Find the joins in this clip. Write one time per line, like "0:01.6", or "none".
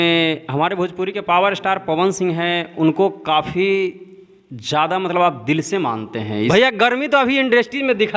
0:06.5